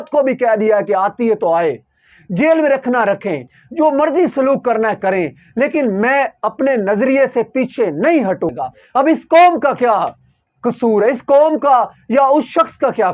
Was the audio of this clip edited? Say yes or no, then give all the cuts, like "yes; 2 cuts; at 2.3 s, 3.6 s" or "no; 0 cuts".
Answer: yes; 1 cut; at 8.5 s